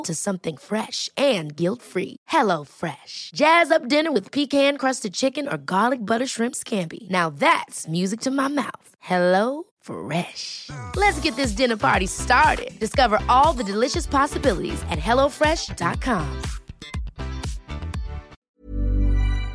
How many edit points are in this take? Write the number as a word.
one